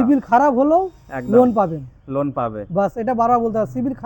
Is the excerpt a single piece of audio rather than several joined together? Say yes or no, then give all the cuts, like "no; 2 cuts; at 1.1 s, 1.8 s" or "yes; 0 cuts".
yes; 0 cuts